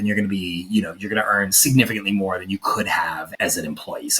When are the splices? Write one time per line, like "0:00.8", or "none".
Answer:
0:03.3

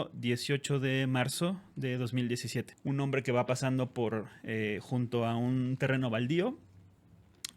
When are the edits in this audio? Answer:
0:02.7

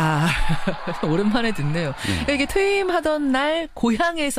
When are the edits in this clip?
0:01.6

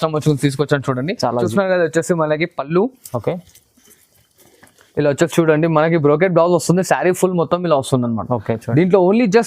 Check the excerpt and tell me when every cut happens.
0:01.5

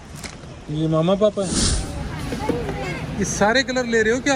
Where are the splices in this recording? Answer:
0:01.7

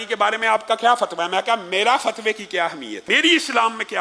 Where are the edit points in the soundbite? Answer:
0:02.9

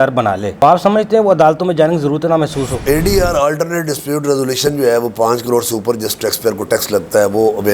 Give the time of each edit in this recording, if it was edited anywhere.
0:02.8

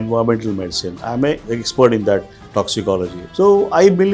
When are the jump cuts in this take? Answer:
0:01.4
0:03.2

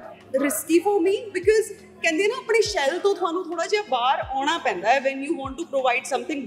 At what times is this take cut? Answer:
none

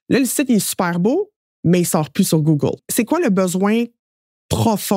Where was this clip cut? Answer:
0:02.8

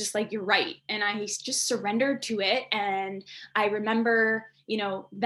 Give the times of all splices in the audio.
none

